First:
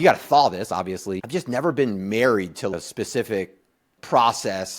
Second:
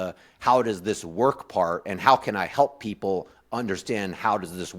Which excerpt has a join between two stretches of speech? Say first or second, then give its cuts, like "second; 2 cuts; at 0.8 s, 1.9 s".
first; 3 cuts; at 1.2 s, 2.7 s, 4.0 s